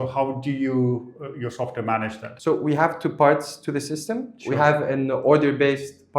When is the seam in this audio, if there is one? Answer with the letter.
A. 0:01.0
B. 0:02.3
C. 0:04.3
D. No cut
B